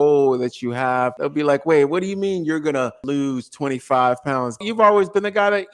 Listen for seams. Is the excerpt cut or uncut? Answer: cut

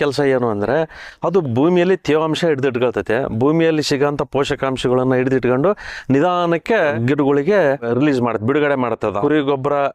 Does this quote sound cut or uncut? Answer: cut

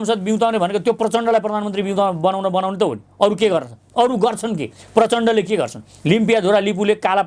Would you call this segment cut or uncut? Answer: uncut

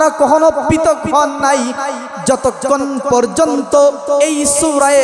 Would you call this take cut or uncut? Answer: uncut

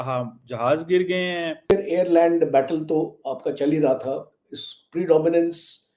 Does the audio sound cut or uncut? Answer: cut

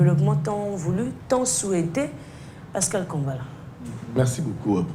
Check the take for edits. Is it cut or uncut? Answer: uncut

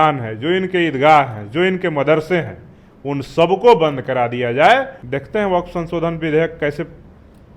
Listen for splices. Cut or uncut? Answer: cut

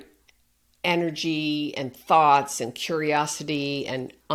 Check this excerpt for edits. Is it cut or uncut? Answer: uncut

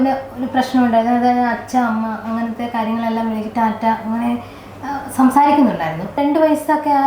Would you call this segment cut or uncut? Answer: cut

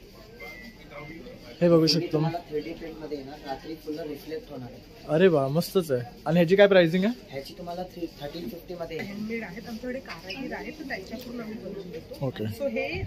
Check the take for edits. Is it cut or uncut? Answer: cut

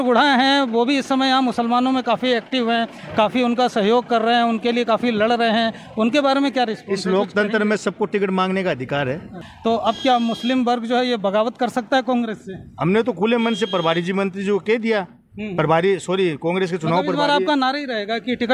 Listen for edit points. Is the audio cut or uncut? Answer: cut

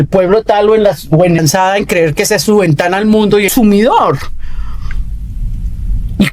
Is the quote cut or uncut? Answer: cut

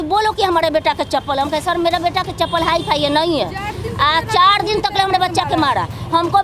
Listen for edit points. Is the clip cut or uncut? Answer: uncut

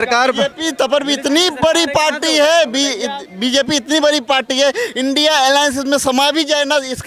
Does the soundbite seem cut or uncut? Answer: uncut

